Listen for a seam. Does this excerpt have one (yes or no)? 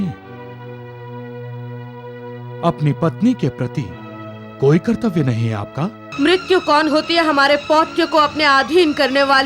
yes